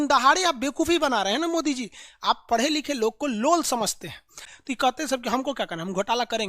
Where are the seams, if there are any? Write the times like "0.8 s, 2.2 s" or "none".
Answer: 4.4 s